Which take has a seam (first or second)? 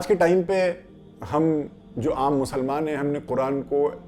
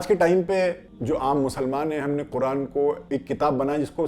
second